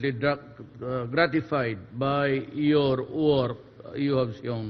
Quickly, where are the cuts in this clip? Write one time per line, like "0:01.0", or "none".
0:02.5